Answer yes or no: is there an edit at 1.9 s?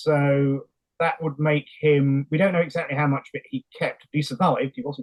no